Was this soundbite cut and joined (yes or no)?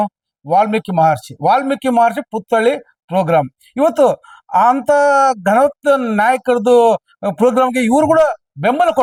no